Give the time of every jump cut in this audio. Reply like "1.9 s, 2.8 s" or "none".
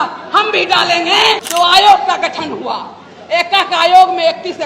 1.4 s